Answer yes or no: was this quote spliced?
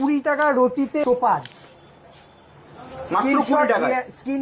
yes